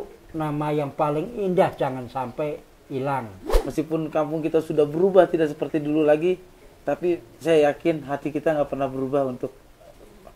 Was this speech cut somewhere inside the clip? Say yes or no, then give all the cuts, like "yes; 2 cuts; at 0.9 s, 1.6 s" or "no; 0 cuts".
yes; 1 cut; at 3.4 s